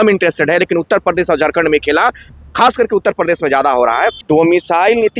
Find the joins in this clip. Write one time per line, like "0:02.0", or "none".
0:04.2